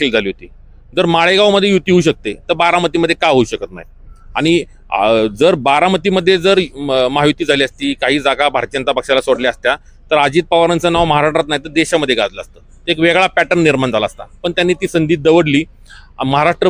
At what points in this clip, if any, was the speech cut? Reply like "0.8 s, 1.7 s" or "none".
none